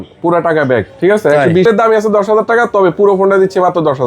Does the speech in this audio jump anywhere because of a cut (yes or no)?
yes